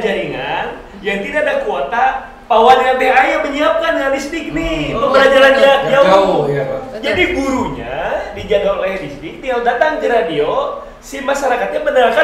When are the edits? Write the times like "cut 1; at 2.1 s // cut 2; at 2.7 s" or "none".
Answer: none